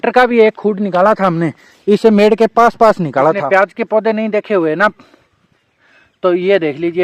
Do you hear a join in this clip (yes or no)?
yes